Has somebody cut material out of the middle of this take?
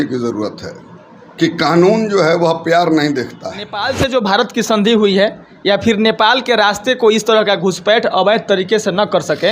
yes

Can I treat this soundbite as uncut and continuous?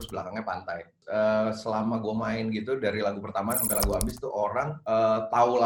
no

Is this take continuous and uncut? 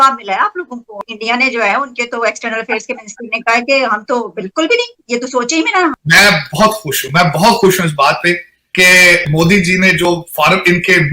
no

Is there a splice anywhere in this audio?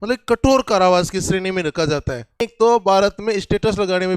yes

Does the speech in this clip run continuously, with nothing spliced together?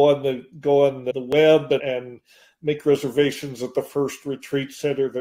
no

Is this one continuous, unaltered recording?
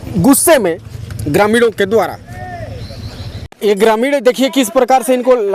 no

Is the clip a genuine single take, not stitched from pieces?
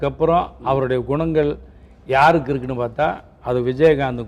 yes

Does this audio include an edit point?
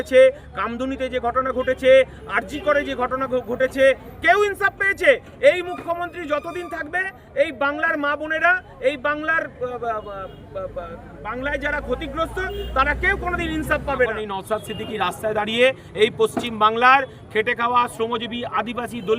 yes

